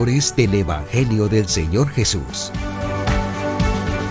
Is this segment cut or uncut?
cut